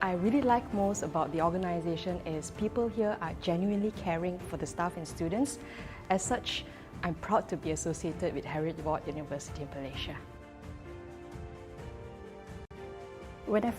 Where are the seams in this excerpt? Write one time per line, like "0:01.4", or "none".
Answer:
0:10.5
0:12.7